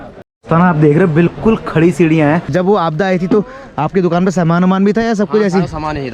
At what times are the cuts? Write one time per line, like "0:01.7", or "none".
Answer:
0:02.5

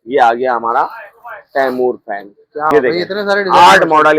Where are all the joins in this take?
0:02.7

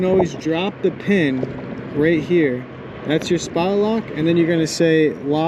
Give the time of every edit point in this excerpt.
none

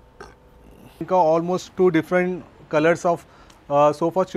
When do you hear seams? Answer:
0:01.0

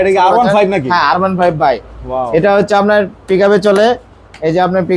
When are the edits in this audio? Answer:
none

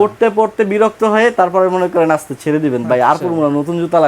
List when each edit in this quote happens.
none

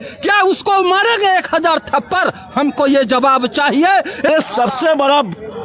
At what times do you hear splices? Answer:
0:04.3

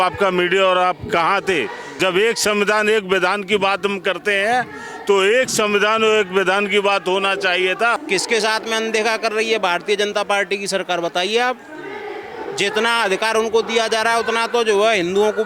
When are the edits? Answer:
0:01.9
0:08.0

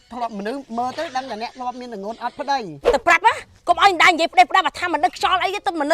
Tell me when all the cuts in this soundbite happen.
0:02.8

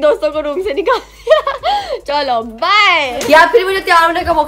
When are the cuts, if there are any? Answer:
none

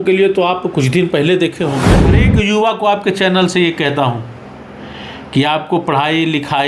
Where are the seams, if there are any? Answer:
0:02.2

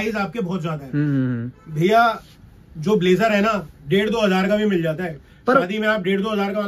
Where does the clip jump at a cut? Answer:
none

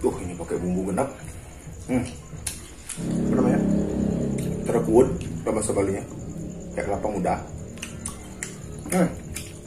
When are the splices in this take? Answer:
0:03.0

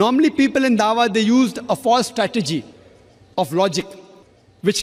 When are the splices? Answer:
none

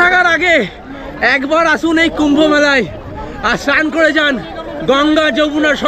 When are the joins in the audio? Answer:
none

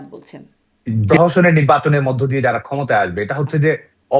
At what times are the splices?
0:01.0

